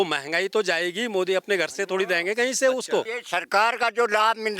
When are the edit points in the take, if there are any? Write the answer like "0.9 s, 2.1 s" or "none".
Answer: 3.2 s